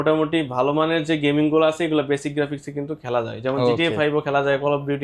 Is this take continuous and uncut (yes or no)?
yes